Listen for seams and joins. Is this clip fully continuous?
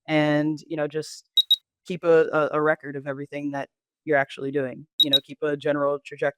no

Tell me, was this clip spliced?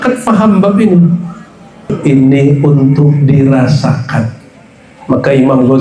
yes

